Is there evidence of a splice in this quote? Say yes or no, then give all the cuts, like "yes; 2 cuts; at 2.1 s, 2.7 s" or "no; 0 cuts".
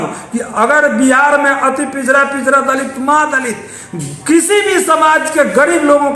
no; 0 cuts